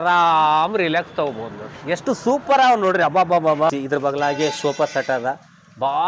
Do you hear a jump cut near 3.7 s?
yes; 1 cut; at 3.7 s

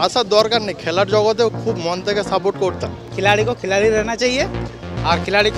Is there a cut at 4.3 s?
no; 1 cut; at 3.0 s

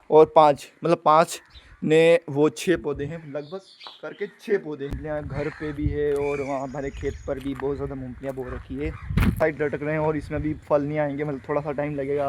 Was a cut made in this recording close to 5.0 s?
yes; 2 cuts; at 5.0 s, 9.4 s

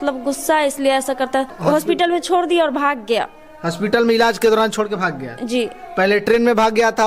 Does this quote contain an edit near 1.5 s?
yes; 1 cut; at 1.5 s

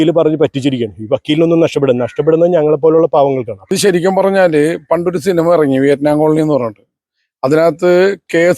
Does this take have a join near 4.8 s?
no; 1 cut; at 3.6 s

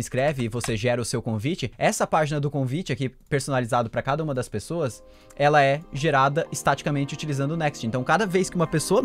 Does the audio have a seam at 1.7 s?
yes; 1 cut; at 1.7 s

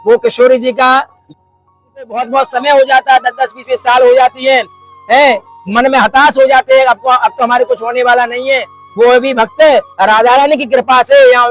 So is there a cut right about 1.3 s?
yes; 1 cut; at 1.3 s

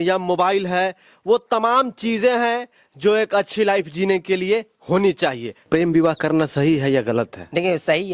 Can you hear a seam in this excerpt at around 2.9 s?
no; 1 cut; at 5.7 s

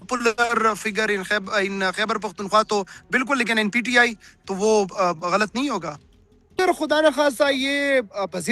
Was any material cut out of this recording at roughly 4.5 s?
no; 1 cut; at 6.5 s

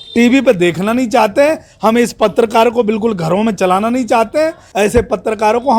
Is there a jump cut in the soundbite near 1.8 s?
no; 1 cut; at 4.6 s

